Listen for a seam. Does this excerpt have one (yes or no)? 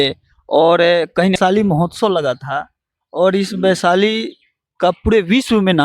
yes